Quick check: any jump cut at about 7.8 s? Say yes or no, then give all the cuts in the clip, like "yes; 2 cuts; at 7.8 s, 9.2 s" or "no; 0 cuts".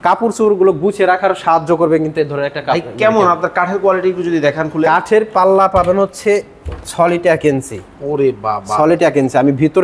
no; 0 cuts